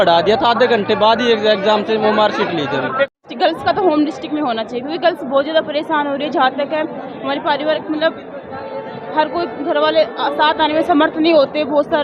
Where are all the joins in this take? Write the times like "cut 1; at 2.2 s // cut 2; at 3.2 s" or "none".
cut 1; at 3.1 s